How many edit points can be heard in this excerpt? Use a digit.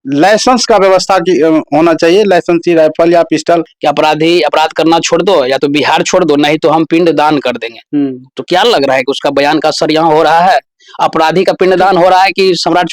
1